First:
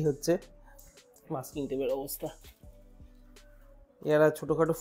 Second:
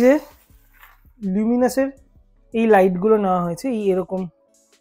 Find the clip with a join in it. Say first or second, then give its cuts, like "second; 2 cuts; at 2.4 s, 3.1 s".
first; 2 cuts; at 2.4 s, 3.9 s